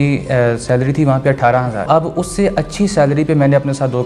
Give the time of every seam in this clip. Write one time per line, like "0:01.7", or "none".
0:01.9